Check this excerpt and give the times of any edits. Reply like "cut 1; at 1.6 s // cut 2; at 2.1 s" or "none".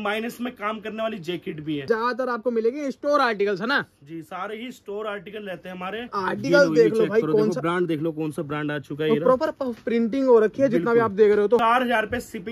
cut 1; at 1.8 s // cut 2; at 6.2 s // cut 3; at 11.6 s